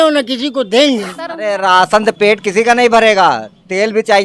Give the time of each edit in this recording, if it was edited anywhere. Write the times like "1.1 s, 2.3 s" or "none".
1.5 s